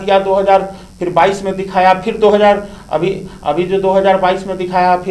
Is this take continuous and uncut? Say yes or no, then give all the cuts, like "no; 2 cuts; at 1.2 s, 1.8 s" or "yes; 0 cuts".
yes; 0 cuts